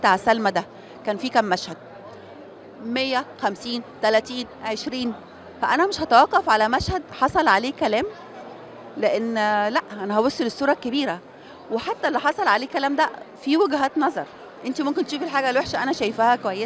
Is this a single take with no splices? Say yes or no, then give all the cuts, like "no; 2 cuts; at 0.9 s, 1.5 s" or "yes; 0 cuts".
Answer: yes; 0 cuts